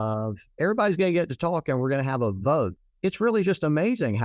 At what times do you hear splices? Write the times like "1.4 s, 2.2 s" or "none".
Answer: 2.7 s